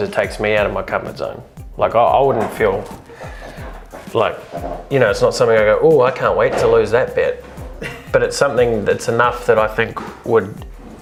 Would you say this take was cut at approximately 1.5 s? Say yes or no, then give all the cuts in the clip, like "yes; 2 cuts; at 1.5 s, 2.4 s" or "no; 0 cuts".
no; 0 cuts